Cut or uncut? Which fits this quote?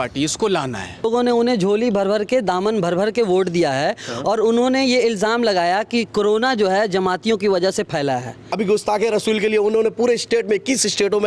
cut